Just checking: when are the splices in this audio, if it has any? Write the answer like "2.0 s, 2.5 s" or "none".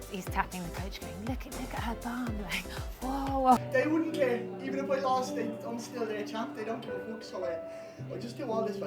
3.6 s